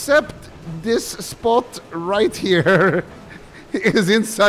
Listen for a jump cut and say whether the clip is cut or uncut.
uncut